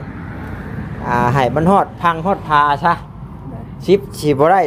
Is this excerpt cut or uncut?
uncut